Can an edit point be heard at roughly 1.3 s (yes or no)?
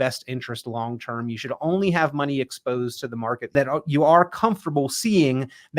no